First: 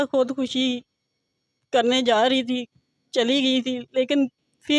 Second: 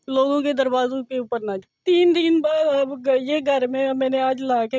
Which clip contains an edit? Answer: second; 1 cut; at 1.7 s

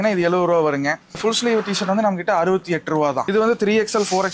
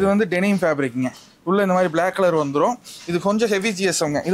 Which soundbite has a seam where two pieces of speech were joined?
first; 2 cuts; at 1.2 s, 3.2 s

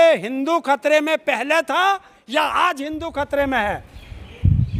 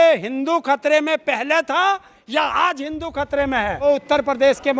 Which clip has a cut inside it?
second; 1 cut; at 3.8 s

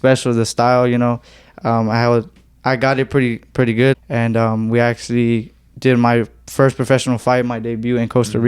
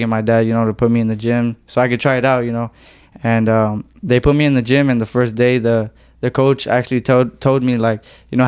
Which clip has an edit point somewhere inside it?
first; 1 cut; at 4.0 s

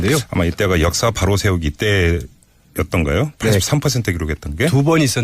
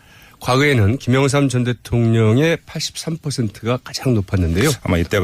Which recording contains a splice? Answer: first; 1 cut; at 3.9 s

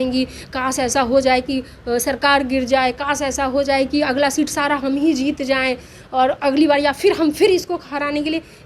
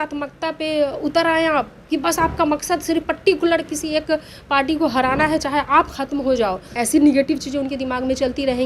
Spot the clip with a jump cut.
second; 1 cut; at 6.6 s

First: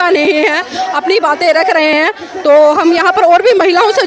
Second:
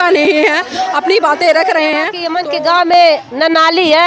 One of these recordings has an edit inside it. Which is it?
second; 1 cut; at 2.3 s

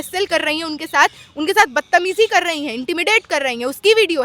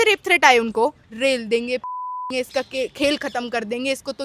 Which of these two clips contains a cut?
second; 1 cut; at 1.1 s

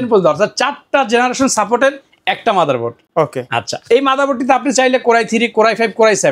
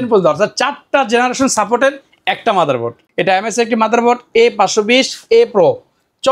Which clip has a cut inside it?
second; 1 cut; at 3.0 s

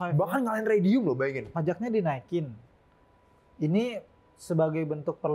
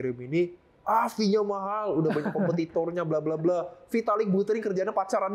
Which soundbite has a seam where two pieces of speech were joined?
first; 1 cut; at 1.4 s

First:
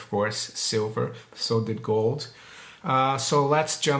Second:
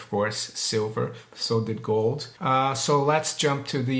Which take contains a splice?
second; 1 cut; at 2.3 s

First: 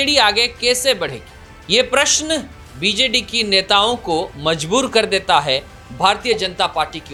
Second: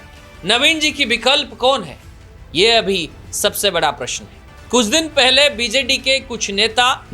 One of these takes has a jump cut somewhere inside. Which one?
second; 1 cut; at 4.6 s

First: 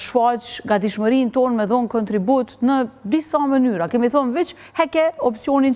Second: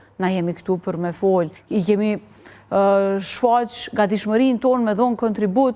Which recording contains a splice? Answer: second; 1 cut; at 1.6 s

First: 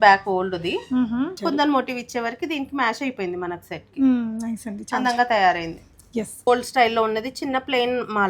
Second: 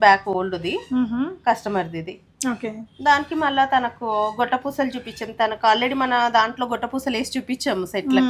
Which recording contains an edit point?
first; 2 cuts; at 1.4 s, 6.5 s

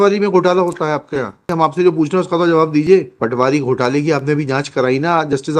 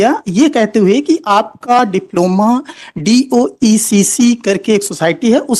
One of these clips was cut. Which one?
first; 2 cuts; at 1.5 s, 3.1 s

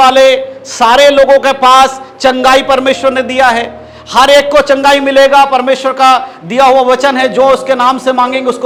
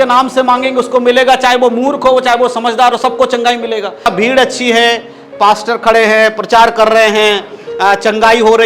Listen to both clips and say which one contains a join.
second; 1 cut; at 4.1 s

